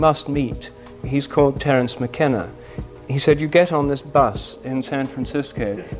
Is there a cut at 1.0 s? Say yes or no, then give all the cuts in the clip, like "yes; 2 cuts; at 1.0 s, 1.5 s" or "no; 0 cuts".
yes; 1 cut; at 1.0 s